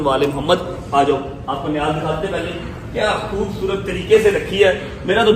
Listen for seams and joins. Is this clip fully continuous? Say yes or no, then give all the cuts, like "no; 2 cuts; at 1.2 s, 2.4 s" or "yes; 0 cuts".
yes; 0 cuts